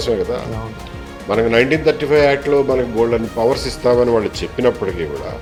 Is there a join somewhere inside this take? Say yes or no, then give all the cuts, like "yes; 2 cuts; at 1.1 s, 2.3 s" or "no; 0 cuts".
no; 0 cuts